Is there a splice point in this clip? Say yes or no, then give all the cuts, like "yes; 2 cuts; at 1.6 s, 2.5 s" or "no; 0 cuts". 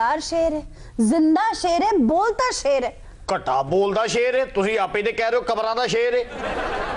no; 0 cuts